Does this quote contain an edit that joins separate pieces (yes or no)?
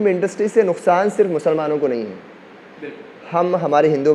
no